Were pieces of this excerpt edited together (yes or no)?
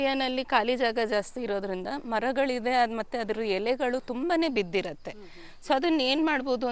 no